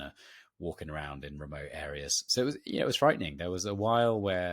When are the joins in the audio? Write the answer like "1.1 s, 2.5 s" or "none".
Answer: 2.2 s